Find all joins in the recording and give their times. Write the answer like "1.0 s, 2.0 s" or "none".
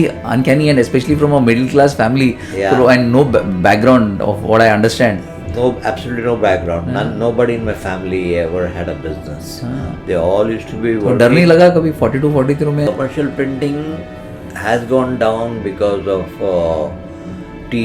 12.9 s